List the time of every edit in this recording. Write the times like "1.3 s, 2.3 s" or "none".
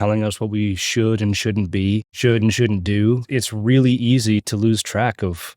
2.1 s, 3.2 s